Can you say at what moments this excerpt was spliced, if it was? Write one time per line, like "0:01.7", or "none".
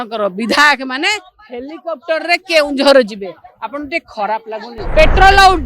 0:04.7